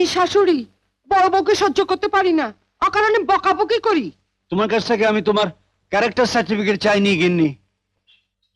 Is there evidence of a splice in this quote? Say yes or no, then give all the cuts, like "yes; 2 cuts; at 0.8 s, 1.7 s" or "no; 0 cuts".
no; 0 cuts